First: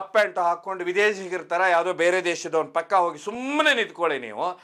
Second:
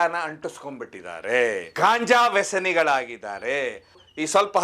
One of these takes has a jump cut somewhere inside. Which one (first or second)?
second